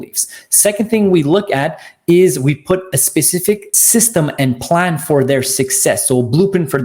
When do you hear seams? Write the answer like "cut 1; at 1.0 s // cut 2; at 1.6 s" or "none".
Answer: cut 1; at 3.7 s